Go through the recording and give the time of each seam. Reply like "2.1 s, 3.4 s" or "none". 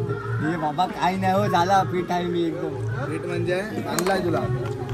none